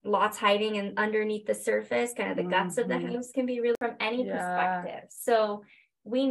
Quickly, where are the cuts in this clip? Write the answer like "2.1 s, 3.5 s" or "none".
3.7 s